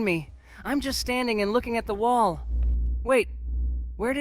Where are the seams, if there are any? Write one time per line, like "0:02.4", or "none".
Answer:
none